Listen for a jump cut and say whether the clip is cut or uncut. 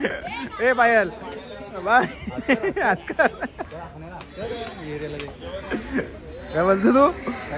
uncut